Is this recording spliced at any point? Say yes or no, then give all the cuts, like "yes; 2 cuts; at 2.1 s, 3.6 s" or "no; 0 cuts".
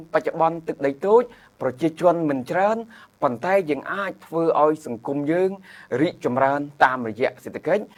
no; 0 cuts